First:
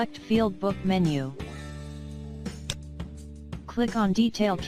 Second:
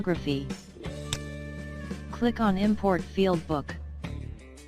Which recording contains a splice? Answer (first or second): second